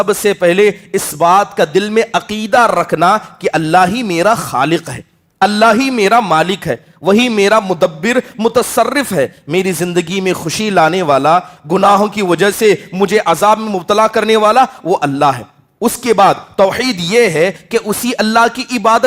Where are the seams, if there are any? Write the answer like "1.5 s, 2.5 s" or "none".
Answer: none